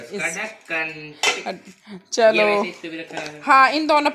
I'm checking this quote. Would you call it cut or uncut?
uncut